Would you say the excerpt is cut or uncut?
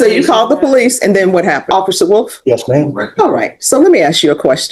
cut